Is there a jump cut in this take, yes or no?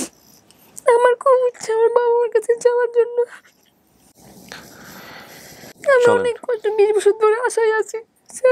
no